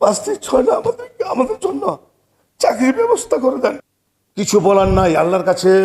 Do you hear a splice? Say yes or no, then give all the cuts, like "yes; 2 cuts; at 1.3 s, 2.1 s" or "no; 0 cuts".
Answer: yes; 1 cut; at 3.8 s